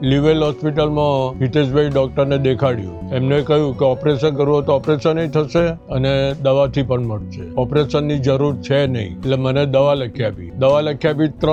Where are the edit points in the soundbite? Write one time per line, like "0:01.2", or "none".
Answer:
none

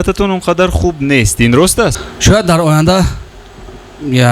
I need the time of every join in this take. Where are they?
0:02.0

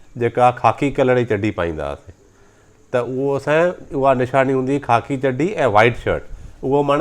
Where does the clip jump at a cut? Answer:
none

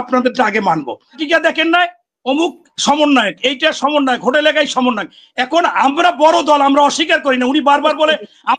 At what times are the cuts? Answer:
0:01.2

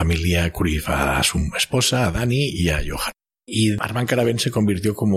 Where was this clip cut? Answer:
0:03.8

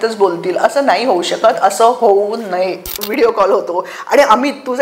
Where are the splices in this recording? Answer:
0:03.0

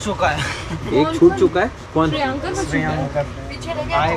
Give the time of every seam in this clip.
none

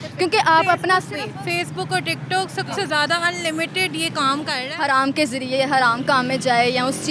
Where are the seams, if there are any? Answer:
0:04.7

